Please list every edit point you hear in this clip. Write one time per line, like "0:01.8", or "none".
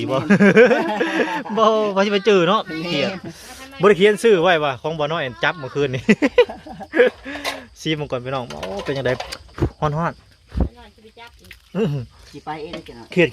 none